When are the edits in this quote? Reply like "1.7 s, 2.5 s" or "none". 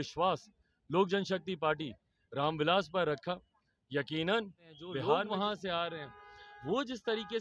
5.0 s